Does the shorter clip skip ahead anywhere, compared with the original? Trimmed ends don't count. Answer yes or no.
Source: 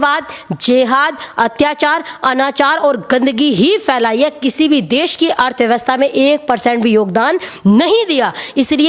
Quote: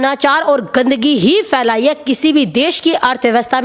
no